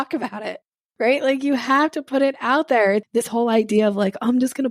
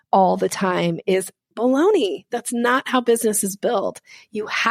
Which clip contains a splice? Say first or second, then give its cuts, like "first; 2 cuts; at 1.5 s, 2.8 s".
first; 1 cut; at 3.1 s